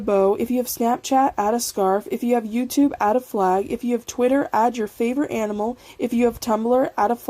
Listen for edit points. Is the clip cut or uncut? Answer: cut